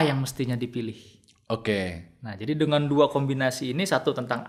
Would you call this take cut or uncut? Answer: uncut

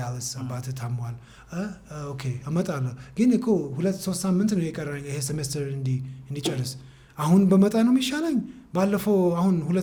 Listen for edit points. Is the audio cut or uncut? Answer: uncut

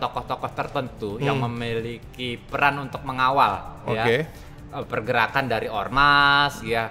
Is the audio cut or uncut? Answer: uncut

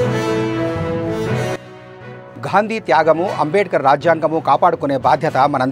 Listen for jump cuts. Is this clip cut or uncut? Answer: cut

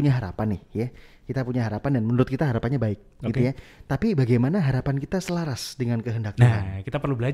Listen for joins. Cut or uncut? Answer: uncut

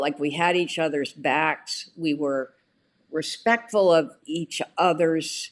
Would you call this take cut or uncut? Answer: cut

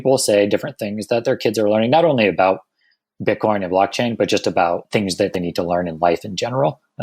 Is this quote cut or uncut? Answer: cut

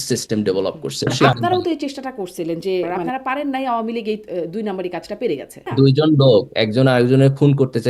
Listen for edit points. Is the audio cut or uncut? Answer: cut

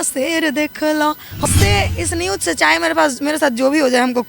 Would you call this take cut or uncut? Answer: cut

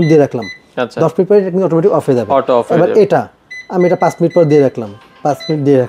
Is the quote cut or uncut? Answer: uncut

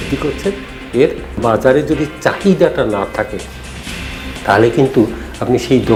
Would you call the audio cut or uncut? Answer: uncut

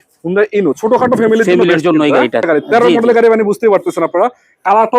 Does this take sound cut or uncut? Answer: cut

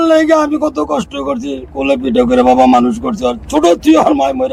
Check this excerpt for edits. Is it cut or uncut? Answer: uncut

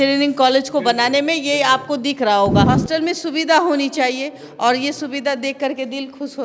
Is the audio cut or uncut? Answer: cut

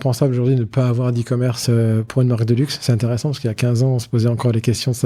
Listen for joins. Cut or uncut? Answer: uncut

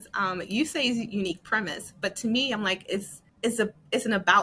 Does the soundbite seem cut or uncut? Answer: cut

